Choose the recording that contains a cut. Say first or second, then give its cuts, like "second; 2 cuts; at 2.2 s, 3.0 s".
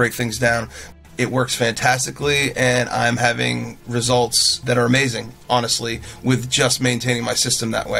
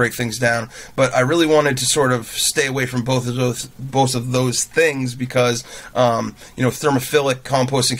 first; 2 cuts; at 0.8 s, 4.6 s